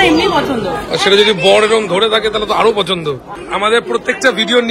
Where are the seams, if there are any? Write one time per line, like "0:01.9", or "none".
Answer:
0:00.9
0:03.3